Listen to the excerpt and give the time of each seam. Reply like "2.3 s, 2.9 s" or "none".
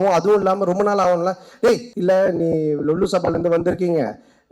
1.9 s